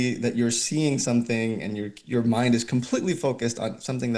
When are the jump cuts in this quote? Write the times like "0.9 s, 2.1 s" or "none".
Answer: none